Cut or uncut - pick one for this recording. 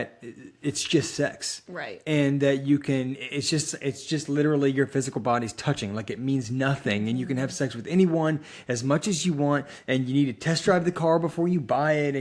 uncut